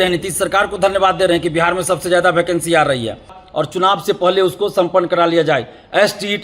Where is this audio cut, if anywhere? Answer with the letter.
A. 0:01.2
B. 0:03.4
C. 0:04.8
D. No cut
B